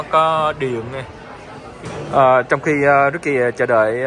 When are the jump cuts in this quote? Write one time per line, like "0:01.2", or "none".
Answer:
0:01.8